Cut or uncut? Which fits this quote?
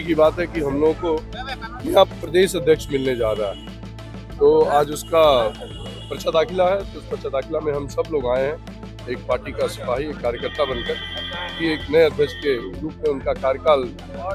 uncut